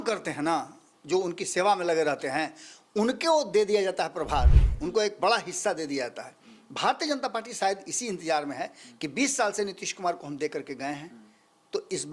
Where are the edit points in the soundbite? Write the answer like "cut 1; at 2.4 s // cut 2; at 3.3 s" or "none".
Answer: none